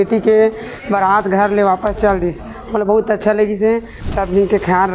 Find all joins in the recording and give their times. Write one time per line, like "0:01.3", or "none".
0:04.0